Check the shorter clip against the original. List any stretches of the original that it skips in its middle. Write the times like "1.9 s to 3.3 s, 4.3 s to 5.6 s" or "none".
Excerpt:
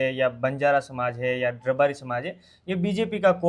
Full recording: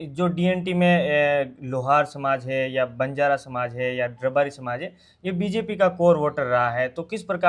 none